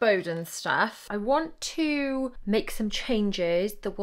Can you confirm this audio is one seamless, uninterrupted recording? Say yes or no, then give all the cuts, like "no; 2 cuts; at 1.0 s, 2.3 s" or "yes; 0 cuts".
no; 2 cuts; at 1.0 s, 2.4 s